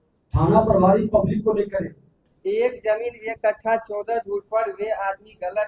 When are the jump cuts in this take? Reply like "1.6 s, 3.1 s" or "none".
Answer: 2.3 s